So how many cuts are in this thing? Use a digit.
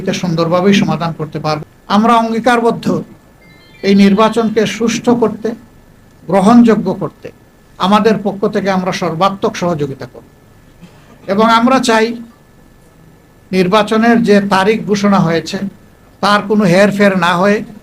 1